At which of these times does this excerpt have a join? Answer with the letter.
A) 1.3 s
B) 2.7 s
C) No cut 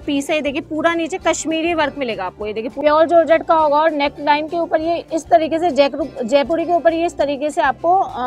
B